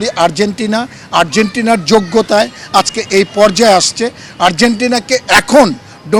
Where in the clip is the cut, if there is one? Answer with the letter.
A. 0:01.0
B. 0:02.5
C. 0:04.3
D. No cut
D